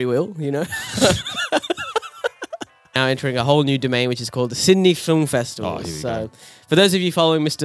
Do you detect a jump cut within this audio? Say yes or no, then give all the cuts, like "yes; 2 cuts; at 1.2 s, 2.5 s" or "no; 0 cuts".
yes; 1 cut; at 3.0 s